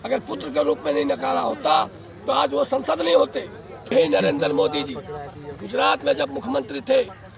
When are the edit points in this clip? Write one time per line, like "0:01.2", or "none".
0:03.7